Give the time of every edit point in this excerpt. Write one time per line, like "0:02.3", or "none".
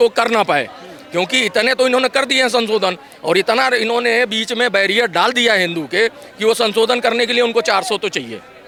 none